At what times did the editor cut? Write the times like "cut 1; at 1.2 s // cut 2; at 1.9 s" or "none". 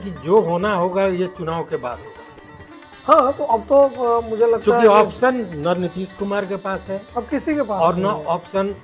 none